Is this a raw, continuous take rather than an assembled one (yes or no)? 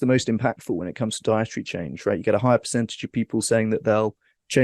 yes